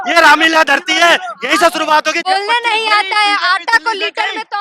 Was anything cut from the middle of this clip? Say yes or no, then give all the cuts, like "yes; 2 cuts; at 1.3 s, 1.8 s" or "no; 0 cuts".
yes; 1 cut; at 2.2 s